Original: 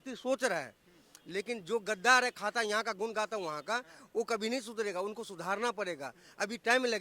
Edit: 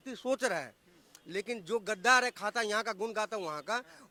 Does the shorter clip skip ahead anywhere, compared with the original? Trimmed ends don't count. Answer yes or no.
no